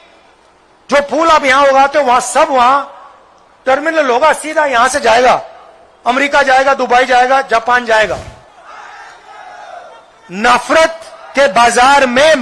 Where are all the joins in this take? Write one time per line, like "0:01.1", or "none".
0:08.5